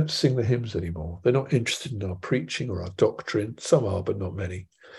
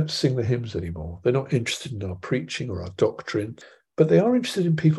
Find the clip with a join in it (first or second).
second